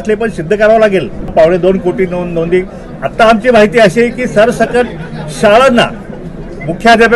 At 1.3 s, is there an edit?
yes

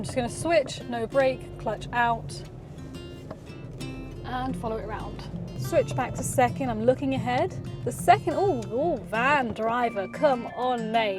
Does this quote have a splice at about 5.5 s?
yes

